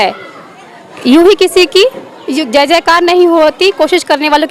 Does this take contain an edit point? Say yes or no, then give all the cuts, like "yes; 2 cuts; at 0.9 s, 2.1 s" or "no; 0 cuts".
no; 0 cuts